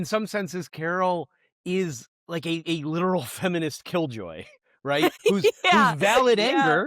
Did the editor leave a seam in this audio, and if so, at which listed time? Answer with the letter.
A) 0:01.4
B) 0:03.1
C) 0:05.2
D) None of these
C